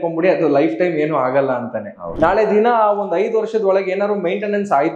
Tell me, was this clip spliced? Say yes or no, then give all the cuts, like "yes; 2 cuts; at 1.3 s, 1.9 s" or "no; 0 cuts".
yes; 1 cut; at 2.1 s